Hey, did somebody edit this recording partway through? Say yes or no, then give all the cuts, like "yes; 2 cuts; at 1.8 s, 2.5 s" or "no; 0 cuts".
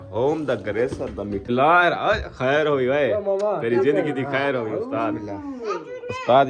yes; 1 cut; at 1.4 s